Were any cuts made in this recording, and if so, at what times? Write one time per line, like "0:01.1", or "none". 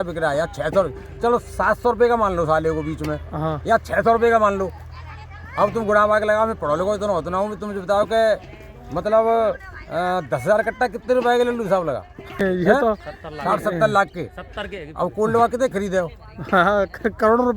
0:12.4

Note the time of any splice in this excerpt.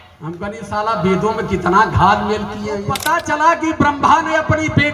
0:03.0

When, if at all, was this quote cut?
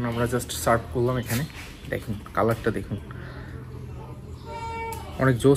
none

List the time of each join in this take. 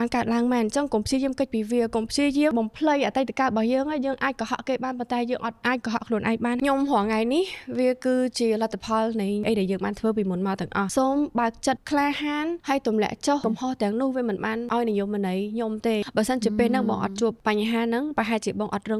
0:06.6
0:09.4
0:10.9
0:13.4
0:16.0

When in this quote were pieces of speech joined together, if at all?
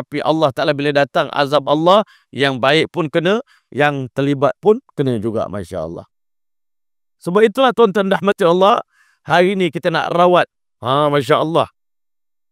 none

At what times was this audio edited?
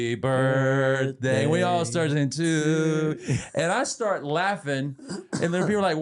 none

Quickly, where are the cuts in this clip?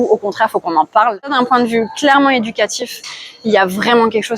0:01.2

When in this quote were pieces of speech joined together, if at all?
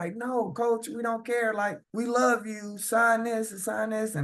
0:01.8

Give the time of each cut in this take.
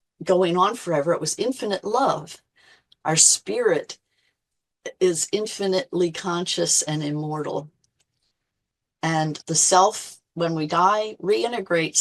0:02.9
0:09.4

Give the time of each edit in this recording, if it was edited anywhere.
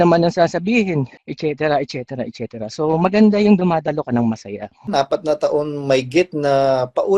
0:01.2
0:04.9

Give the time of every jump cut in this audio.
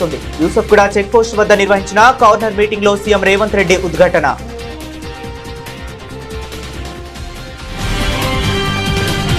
0:07.0

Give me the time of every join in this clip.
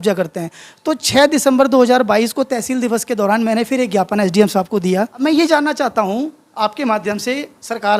0:05.1

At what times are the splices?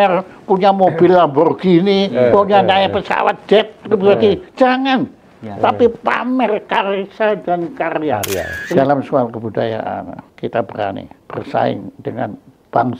0:08.8
0:10.2
0:11.2

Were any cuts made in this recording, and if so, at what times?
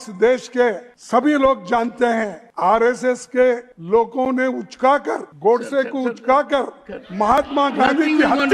0:00.9
0:02.4
0:03.7
0:05.3

